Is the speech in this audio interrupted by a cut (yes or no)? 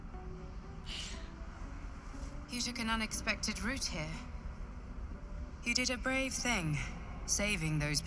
no